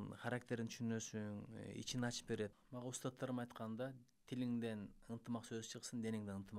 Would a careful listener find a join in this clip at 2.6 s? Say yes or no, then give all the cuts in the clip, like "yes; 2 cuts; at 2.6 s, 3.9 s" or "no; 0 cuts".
yes; 1 cut; at 2.6 s